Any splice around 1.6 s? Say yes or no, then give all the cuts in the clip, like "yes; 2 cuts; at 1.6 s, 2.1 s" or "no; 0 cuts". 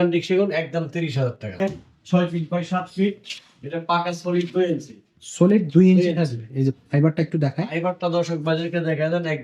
yes; 1 cut; at 1.6 s